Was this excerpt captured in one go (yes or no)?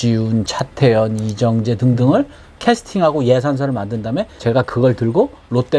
yes